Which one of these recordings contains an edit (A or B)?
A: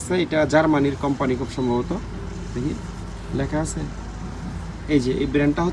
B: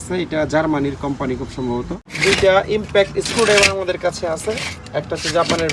B